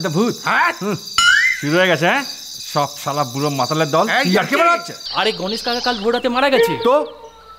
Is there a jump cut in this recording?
yes; 1 cut; at 5.0 s

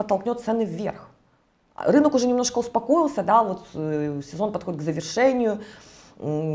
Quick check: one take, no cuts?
yes; 0 cuts

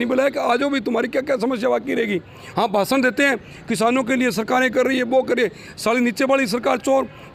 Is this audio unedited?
yes; 0 cuts

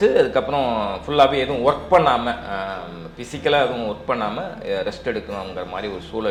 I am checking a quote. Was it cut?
no; 0 cuts

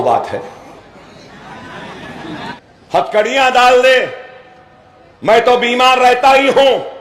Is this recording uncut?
no; 1 cut; at 2.5 s

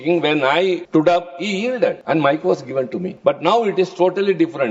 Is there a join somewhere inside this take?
yes; 3 cuts; at 0.8 s, 2.0 s, 3.1 s

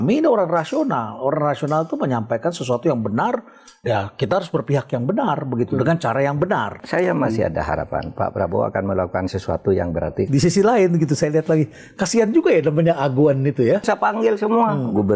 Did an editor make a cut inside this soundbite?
yes; 3 cuts; at 6.8 s, 10.3 s, 13.8 s

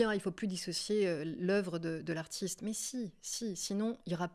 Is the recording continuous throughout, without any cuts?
yes; 0 cuts

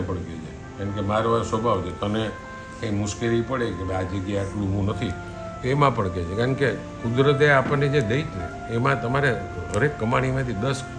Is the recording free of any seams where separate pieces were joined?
yes; 0 cuts

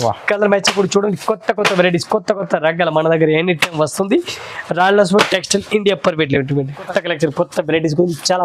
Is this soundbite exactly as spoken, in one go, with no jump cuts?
no; 1 cut; at 6.9 s

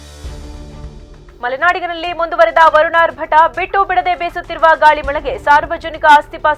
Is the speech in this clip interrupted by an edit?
no; 0 cuts

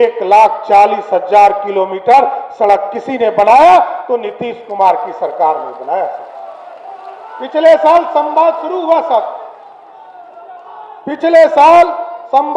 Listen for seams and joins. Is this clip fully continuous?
yes; 0 cuts

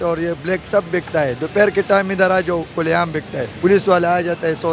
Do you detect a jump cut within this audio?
yes; 1 cut; at 3.5 s

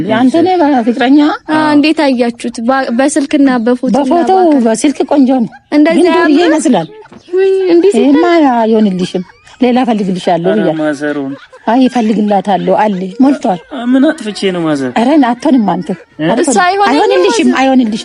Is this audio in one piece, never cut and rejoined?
yes; 0 cuts

